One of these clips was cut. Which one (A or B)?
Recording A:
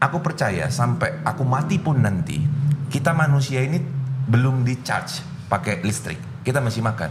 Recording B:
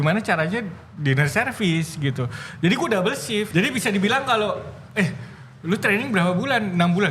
B